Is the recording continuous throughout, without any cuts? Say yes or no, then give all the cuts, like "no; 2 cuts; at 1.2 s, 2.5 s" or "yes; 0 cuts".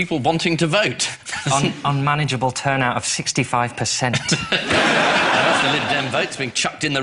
no; 1 cut; at 5.5 s